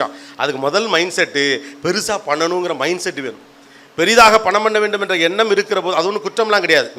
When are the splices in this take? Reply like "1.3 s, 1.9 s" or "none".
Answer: none